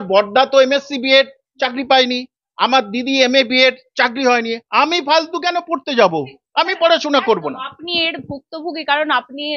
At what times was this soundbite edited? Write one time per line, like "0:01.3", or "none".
none